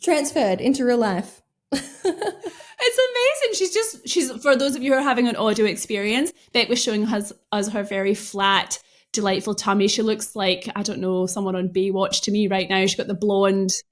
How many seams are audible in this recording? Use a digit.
0